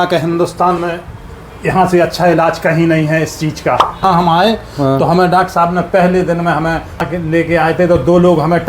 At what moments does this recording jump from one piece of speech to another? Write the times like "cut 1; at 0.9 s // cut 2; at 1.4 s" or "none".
cut 1; at 4.0 s // cut 2; at 7.1 s